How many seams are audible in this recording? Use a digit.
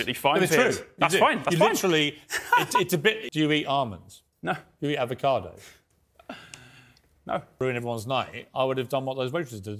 2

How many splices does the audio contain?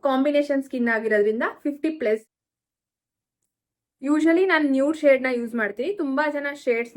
1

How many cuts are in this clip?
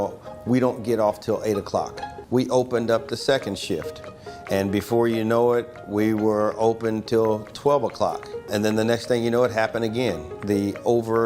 2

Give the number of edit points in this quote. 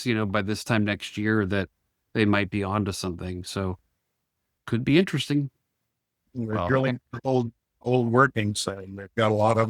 2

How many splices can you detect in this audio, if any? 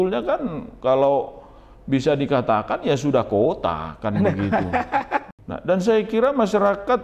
1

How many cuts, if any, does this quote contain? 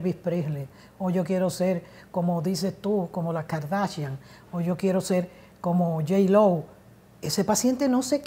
0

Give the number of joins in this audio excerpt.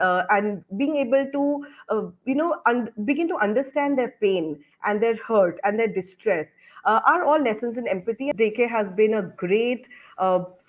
1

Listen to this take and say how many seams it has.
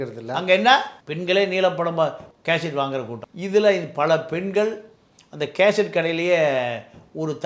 2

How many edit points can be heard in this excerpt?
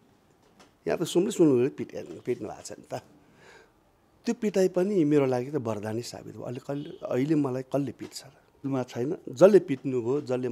1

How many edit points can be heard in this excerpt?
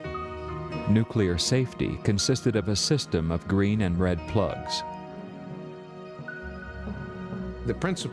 0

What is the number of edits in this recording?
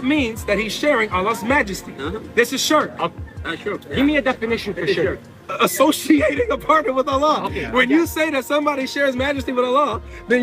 1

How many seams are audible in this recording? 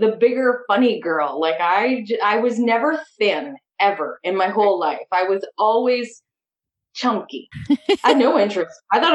1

